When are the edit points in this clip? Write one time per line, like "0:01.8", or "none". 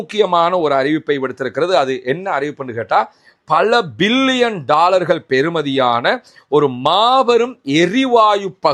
none